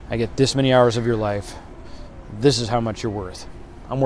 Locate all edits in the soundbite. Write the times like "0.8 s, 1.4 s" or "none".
none